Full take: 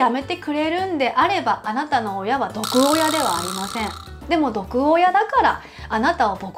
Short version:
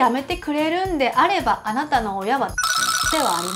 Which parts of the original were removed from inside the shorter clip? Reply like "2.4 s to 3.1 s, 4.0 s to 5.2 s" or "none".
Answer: none